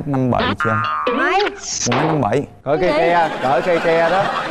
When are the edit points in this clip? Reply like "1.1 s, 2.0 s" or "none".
none